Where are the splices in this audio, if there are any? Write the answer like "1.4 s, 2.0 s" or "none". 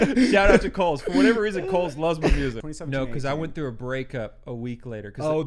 2.6 s